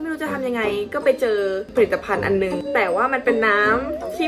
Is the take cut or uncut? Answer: uncut